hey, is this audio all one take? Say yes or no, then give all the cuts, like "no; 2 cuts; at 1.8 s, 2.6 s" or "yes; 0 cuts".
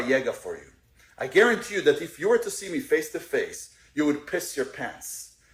yes; 0 cuts